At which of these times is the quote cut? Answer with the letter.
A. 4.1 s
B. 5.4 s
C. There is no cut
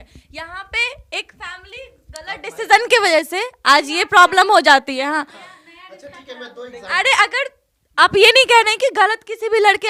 C